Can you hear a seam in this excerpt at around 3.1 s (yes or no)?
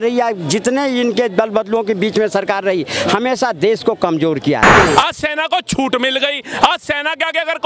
no